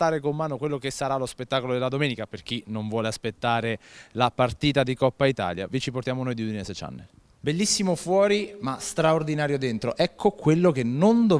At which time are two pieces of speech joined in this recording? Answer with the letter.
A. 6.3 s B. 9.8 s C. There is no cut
B